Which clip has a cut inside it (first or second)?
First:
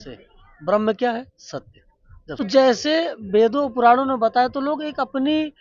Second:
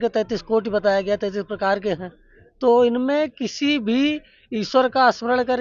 first